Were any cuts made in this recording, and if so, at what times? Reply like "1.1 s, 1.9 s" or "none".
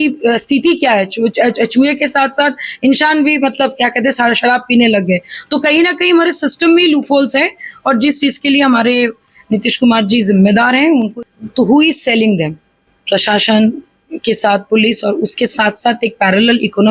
11.1 s

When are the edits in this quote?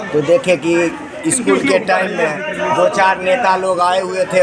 none

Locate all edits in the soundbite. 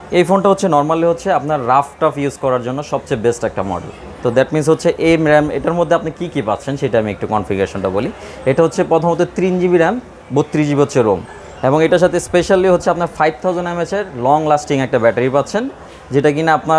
none

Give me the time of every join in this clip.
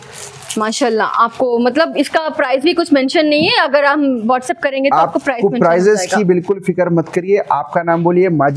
none

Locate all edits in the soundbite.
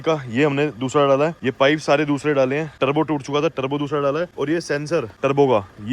1.4 s, 2.8 s, 4.8 s

